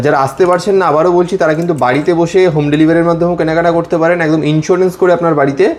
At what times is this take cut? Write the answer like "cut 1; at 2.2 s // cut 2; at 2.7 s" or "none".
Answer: none